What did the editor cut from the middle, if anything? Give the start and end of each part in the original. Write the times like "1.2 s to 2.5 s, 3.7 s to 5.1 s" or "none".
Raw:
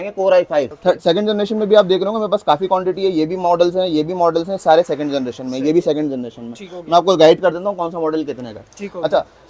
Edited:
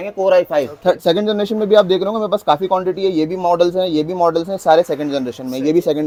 none